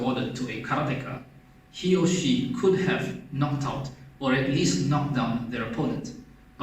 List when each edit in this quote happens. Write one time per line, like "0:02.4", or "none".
none